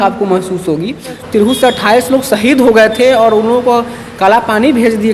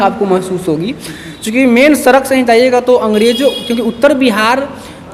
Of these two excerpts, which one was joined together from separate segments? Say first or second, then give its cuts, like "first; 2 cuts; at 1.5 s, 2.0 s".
first; 1 cut; at 1.2 s